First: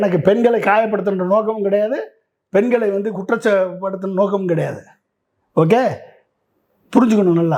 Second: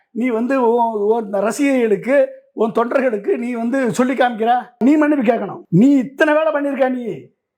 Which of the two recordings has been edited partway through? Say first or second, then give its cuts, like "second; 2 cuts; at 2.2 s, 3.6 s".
second; 2 cuts; at 4.8 s, 5.6 s